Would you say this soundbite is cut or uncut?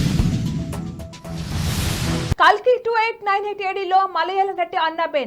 uncut